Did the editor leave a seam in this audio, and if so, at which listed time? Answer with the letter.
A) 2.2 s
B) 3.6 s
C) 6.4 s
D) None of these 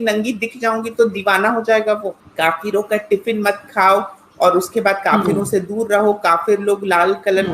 A